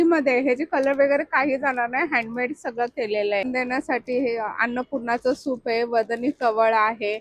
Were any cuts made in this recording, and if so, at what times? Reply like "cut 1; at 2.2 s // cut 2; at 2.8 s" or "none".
cut 1; at 3.4 s